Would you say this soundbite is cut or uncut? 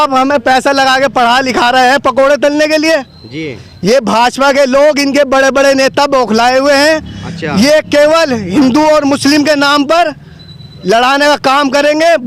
uncut